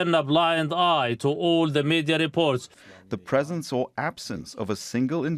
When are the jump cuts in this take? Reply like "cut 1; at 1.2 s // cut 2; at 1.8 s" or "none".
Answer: cut 1; at 2.8 s